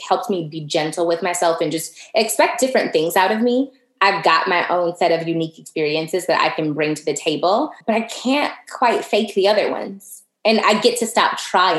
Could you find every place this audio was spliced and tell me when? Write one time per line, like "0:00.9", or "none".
0:07.8